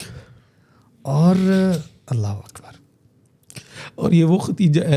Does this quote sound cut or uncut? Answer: uncut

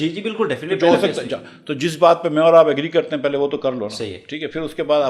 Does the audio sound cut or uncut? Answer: uncut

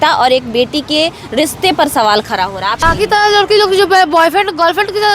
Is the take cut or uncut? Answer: cut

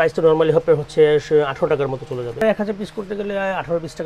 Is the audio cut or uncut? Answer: cut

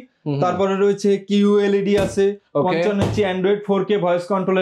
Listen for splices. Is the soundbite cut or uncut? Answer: uncut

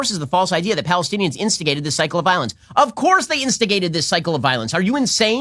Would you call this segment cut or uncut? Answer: uncut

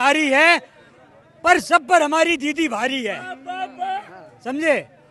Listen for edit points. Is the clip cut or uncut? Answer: uncut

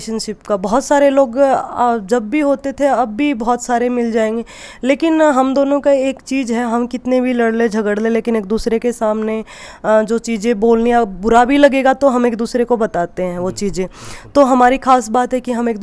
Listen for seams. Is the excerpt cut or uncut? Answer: uncut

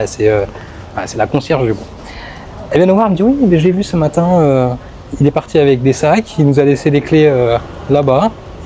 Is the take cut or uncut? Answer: uncut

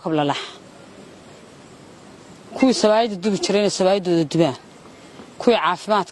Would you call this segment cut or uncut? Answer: uncut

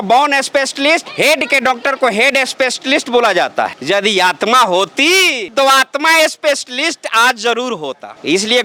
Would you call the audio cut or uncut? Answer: uncut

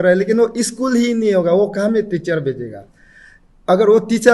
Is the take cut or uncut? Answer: uncut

